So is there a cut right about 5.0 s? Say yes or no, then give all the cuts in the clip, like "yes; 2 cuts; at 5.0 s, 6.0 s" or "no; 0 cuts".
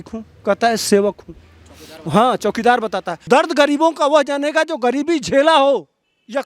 no; 1 cut; at 3.1 s